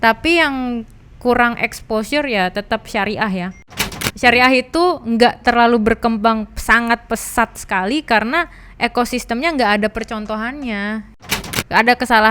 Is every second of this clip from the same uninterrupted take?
no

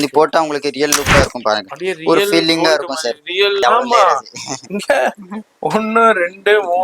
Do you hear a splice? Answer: yes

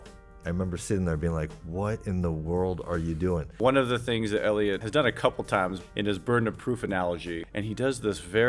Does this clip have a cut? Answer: yes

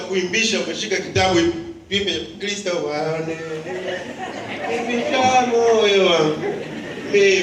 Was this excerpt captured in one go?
yes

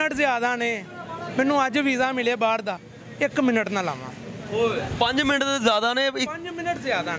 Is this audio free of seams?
yes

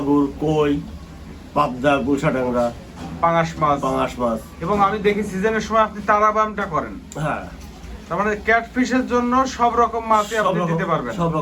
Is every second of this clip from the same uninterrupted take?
yes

